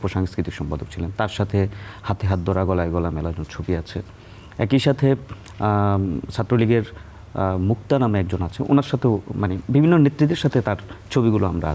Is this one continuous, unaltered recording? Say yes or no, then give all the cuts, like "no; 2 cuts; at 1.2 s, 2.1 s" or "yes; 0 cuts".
yes; 0 cuts